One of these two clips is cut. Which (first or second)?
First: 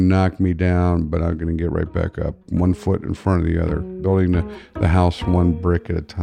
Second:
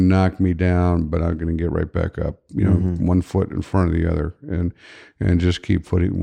first